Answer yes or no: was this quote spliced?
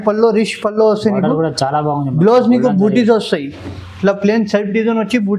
no